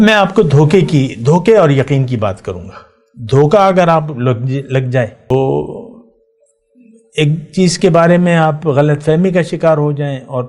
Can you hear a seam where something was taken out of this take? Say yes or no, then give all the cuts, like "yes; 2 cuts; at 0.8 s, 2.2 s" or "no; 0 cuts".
yes; 1 cut; at 5.3 s